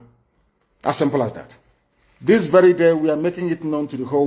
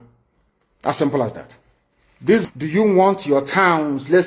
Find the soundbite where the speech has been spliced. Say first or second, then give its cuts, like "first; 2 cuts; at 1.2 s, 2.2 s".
second; 1 cut; at 2.5 s